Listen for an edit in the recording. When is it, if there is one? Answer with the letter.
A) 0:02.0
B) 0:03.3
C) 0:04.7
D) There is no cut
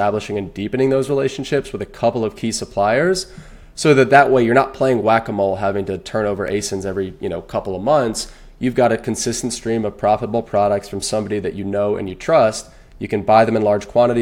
D